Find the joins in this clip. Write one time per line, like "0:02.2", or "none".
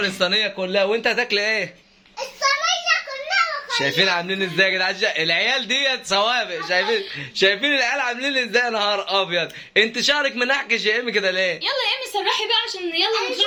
none